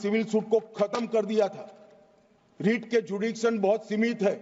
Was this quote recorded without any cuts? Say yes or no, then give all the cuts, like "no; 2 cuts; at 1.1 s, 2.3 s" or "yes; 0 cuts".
yes; 0 cuts